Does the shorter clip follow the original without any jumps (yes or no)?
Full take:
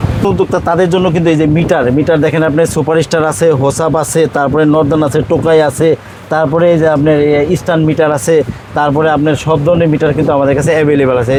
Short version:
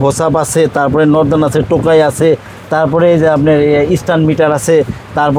yes